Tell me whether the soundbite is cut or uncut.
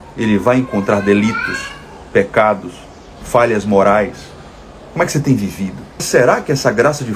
cut